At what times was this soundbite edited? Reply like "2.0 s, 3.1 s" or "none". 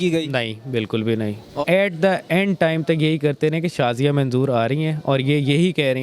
1.5 s